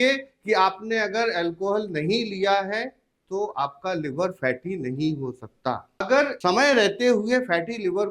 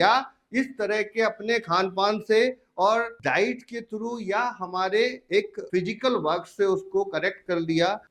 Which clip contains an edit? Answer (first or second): first